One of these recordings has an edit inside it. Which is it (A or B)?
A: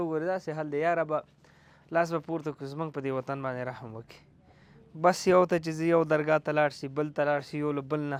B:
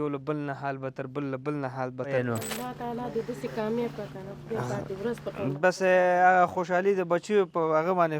B